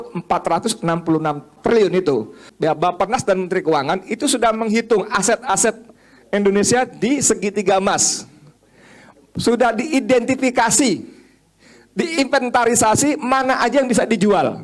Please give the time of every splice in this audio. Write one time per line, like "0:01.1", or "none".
0:01.6
0:02.4